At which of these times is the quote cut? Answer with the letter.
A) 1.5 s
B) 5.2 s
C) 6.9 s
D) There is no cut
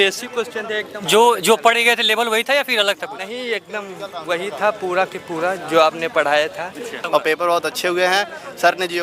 C